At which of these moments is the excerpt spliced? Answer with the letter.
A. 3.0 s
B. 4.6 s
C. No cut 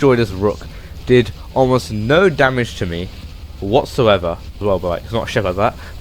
B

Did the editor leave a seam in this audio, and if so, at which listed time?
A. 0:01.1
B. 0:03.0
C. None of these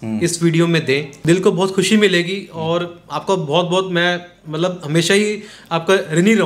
C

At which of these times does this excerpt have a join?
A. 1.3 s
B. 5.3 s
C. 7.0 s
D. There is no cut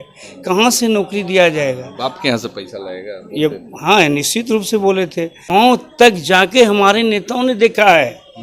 B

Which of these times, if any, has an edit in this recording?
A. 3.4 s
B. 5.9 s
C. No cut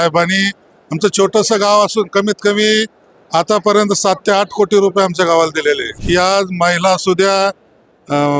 B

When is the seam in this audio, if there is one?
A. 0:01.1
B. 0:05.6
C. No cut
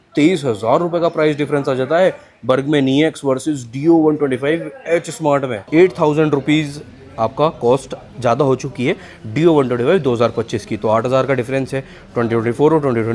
B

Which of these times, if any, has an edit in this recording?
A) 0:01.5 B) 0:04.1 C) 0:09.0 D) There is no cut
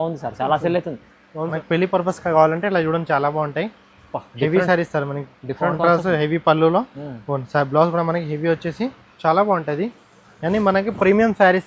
A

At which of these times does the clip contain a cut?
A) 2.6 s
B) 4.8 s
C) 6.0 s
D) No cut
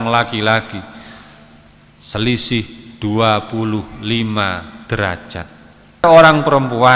C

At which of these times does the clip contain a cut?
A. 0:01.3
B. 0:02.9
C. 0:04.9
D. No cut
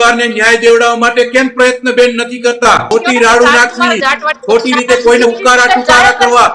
B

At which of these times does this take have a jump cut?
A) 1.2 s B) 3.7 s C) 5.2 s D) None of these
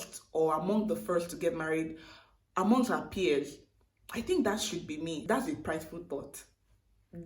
C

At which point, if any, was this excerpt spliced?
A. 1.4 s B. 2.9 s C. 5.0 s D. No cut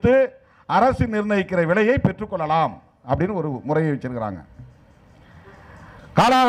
D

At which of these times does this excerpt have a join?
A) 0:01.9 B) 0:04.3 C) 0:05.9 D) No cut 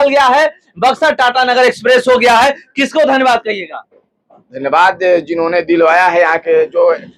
D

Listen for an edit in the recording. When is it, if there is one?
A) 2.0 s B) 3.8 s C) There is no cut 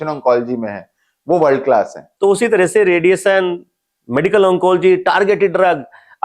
A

